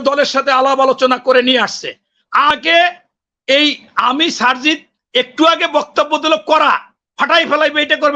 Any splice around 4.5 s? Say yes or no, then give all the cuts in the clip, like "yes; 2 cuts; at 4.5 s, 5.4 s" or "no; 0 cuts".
no; 1 cut; at 2.5 s